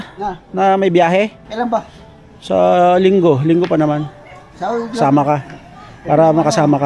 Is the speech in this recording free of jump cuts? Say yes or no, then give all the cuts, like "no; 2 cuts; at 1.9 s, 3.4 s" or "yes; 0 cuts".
no; 1 cut; at 1.4 s